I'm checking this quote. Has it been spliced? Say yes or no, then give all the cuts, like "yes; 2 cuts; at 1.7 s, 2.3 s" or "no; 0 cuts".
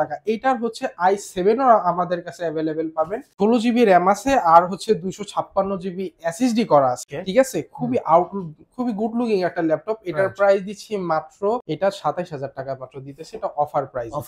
yes; 3 cuts; at 3.3 s, 7.1 s, 11.6 s